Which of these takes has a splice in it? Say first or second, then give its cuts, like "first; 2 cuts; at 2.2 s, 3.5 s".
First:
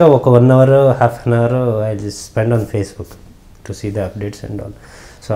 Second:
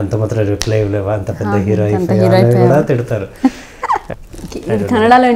second; 1 cut; at 4.1 s